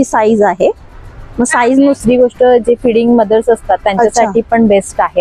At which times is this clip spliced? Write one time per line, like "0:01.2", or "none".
0:02.0